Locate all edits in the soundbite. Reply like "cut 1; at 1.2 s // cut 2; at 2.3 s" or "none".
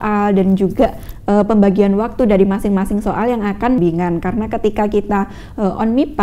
cut 1; at 3.8 s